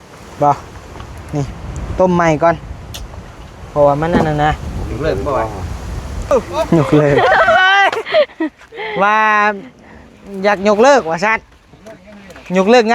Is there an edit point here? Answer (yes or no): yes